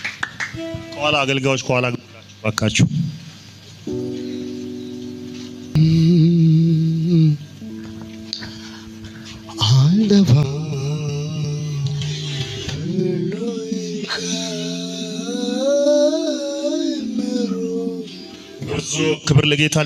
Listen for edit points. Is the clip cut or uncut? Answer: uncut